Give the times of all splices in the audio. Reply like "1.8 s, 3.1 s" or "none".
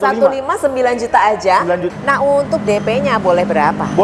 1.9 s